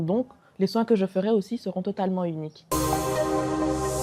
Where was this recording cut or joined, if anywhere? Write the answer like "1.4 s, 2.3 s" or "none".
2.5 s